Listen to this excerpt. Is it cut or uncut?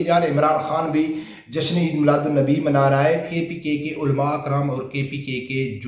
cut